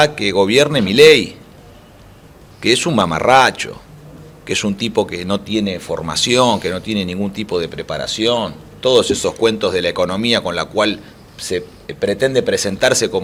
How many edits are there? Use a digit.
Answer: 0